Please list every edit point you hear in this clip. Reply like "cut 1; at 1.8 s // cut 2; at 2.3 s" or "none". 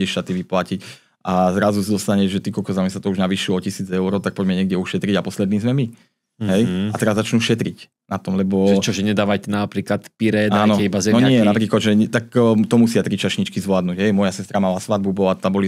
none